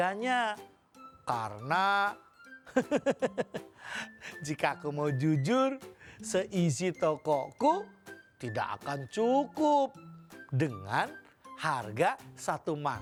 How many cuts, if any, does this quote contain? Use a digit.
0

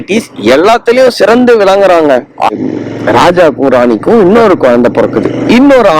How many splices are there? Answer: 1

